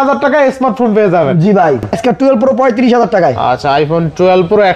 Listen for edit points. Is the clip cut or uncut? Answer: cut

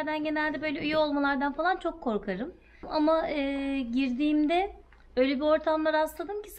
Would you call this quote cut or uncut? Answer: cut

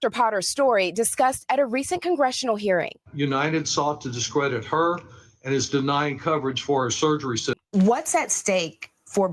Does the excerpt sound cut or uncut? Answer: cut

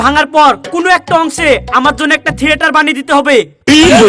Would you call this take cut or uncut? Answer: uncut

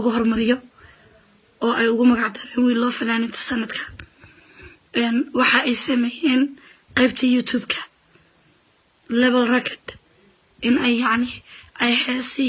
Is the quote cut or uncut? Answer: uncut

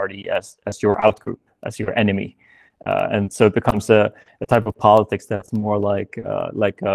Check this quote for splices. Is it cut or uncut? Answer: uncut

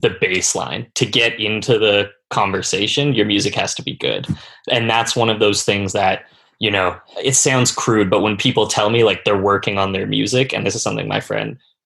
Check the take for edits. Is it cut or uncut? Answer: uncut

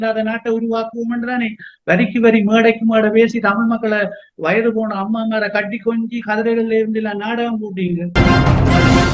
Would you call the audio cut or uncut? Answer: cut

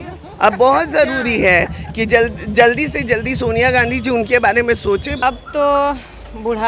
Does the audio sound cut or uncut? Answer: cut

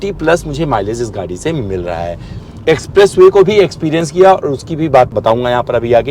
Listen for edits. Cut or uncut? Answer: cut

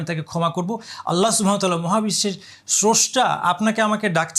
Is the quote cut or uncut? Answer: uncut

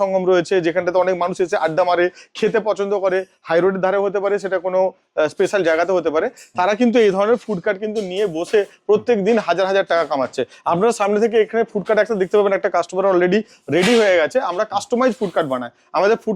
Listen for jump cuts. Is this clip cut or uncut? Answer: uncut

